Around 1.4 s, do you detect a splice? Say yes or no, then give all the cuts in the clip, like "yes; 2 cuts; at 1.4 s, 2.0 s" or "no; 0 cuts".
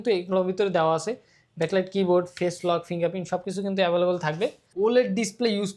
no; 1 cut; at 4.6 s